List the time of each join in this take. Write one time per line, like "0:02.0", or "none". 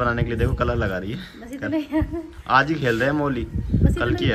none